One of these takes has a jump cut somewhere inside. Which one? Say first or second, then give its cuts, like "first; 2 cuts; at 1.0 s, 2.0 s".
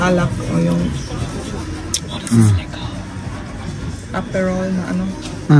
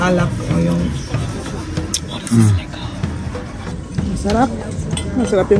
second; 1 cut; at 3.8 s